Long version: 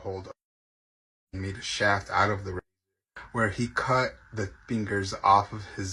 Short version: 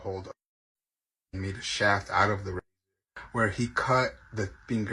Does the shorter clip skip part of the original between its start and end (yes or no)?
no